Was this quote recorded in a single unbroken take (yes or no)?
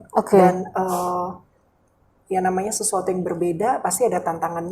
yes